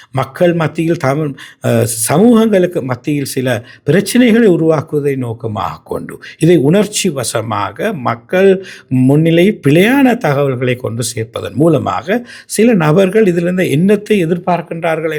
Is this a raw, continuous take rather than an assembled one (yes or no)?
yes